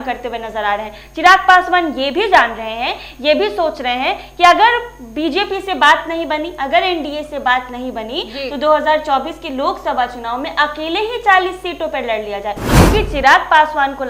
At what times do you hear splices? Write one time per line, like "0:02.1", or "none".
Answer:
none